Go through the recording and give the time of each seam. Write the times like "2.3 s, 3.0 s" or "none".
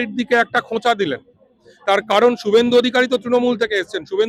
none

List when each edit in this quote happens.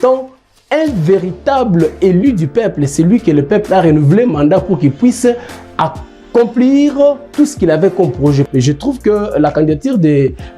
8.5 s

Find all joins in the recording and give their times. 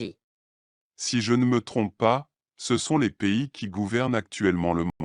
none

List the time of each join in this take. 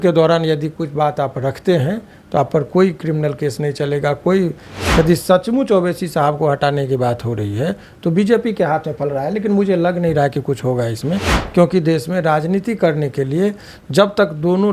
4.7 s

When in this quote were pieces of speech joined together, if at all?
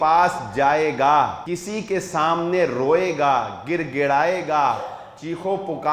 1.5 s

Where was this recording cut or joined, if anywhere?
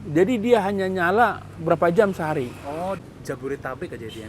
3.0 s

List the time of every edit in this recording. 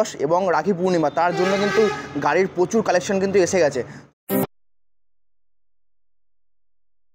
none

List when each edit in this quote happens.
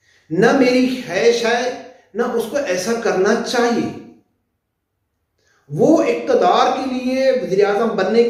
none

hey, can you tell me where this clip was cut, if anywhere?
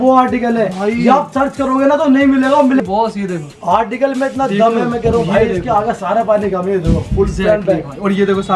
2.8 s

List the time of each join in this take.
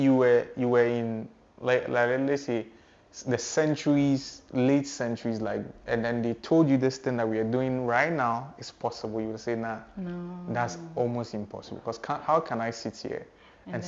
none

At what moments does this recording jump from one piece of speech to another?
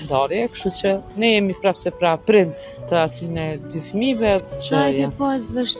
1.1 s, 2.2 s, 4.4 s

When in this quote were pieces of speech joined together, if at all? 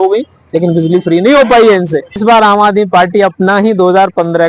2.2 s

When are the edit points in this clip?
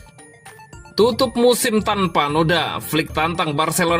0.9 s

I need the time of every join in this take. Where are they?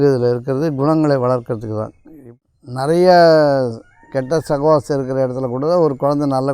2.5 s

